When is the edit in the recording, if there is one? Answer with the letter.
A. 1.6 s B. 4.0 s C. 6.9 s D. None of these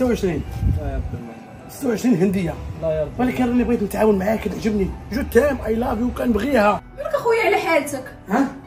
C